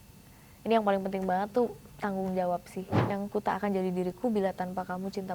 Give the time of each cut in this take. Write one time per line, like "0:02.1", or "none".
0:03.1